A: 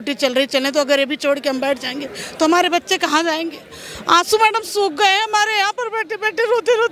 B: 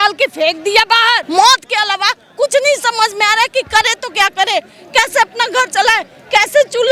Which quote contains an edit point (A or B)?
B